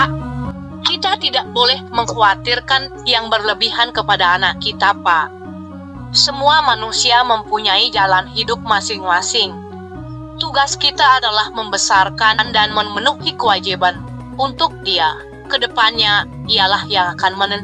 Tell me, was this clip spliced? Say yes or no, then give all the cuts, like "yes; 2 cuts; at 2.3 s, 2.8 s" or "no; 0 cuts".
no; 0 cuts